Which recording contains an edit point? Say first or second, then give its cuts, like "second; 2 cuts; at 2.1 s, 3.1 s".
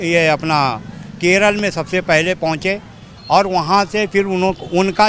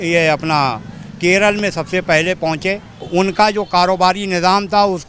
second; 1 cut; at 3.0 s